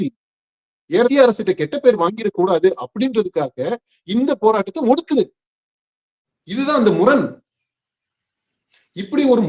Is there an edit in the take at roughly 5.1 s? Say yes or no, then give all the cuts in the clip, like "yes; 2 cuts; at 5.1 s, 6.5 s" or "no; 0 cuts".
no; 1 cut; at 1.1 s